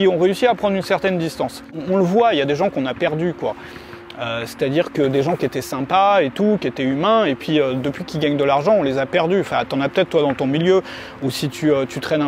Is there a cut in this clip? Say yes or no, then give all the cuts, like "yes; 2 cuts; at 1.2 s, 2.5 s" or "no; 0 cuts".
yes; 1 cut; at 1.7 s